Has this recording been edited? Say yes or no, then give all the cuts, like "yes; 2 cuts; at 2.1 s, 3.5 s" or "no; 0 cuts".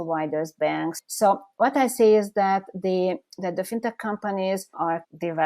yes; 1 cut; at 1.0 s